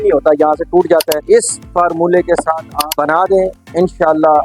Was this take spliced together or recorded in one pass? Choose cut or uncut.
cut